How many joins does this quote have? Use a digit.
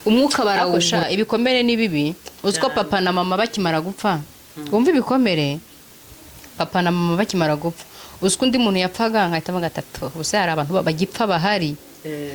1